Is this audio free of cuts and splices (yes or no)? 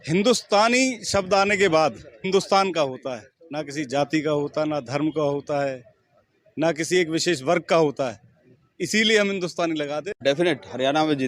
no